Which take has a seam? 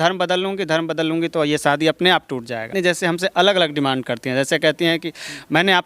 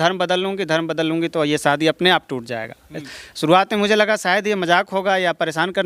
first; 1 cut; at 2.7 s

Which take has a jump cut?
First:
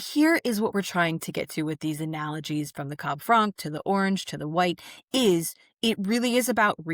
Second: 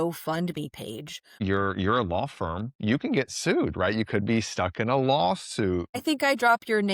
second; 2 cuts; at 1.3 s, 6.0 s

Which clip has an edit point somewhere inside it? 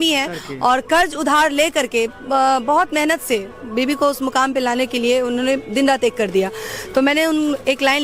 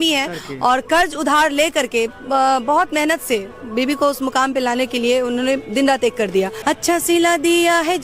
second; 1 cut; at 6.6 s

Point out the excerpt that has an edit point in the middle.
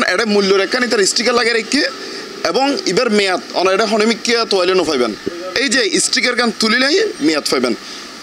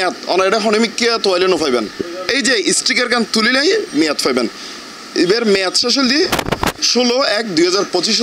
second; 1 cut; at 6.8 s

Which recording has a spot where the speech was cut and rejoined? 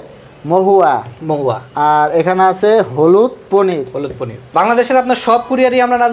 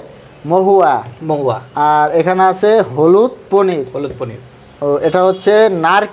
first; 1 cut; at 4.4 s

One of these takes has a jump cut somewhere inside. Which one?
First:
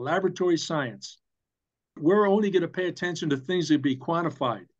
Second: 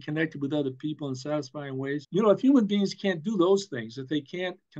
second; 1 cut; at 2.0 s

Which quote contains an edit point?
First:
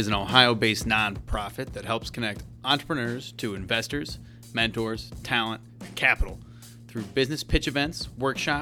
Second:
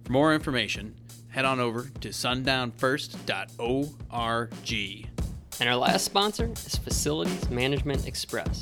second; 1 cut; at 5.0 s

